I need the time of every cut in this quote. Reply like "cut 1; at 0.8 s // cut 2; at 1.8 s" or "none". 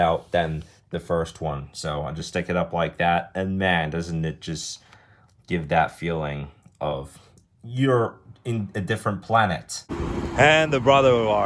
none